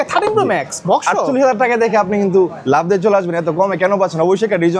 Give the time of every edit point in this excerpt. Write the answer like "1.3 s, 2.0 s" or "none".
none